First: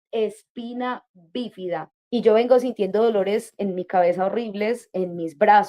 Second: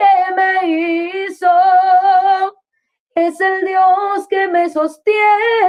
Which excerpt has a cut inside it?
first; 1 cut; at 1.9 s

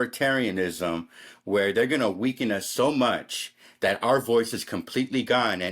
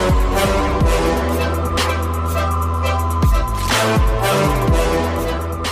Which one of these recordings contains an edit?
first; 1 cut; at 2.6 s

